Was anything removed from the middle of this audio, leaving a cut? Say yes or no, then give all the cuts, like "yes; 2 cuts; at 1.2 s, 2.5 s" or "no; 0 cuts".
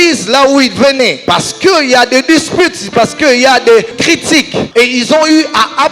yes; 2 cuts; at 1.2 s, 4.1 s